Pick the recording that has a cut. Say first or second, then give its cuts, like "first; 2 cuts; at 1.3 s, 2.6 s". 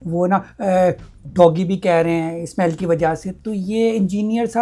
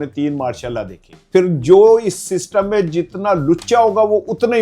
second; 1 cut; at 1.1 s